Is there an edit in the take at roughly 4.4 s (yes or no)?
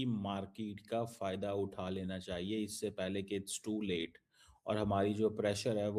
no